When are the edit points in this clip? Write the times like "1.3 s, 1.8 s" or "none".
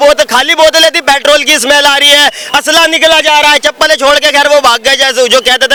none